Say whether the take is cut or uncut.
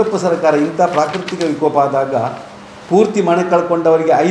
uncut